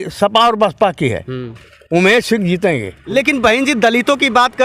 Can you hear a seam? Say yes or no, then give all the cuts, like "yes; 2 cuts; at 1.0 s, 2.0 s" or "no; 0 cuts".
yes; 1 cut; at 3.0 s